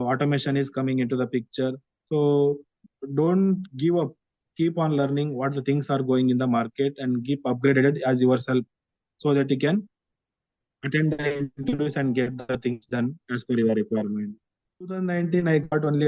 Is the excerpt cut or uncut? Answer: cut